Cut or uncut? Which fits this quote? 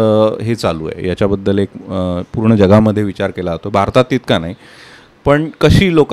uncut